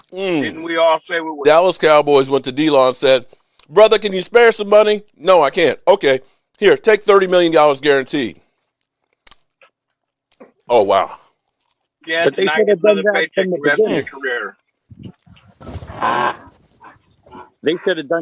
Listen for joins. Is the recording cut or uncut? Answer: cut